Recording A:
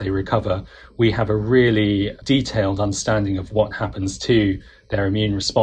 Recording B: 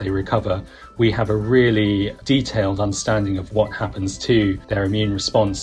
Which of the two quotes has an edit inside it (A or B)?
B